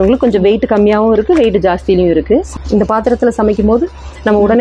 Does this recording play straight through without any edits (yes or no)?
no